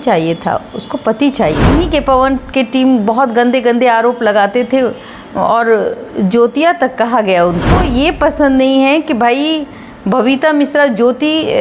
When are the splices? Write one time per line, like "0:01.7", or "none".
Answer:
0:01.7
0:07.8